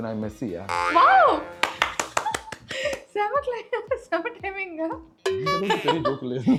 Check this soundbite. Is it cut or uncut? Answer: uncut